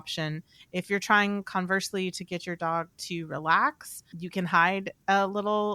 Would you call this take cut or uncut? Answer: cut